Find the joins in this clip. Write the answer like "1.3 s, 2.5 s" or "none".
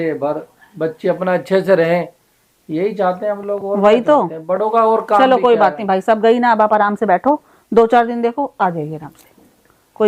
none